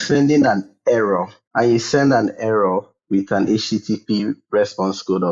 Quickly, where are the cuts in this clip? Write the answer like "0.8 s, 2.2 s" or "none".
1.4 s